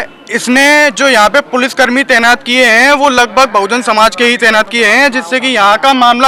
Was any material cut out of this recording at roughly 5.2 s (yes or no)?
no